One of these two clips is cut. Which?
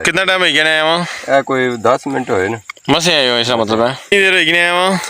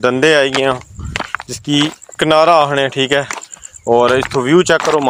first; 1 cut; at 4.0 s

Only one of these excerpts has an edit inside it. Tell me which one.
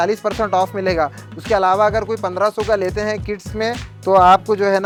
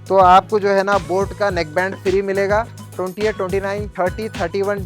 second; 2 cuts; at 2.8 s, 3.9 s

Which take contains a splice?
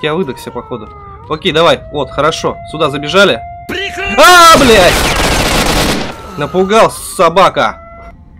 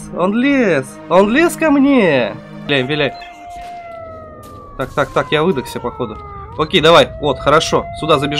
second; 1 cut; at 2.7 s

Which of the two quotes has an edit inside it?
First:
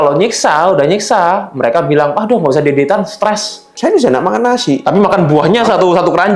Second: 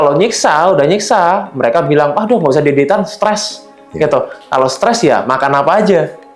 first; 1 cut; at 3.6 s

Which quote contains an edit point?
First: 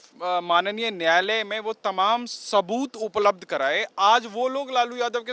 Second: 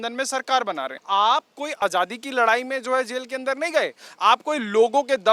second; 2 cuts; at 1.0 s, 1.7 s

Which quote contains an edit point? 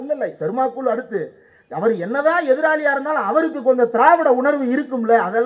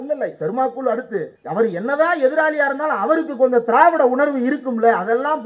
second; 1 cut; at 1.4 s

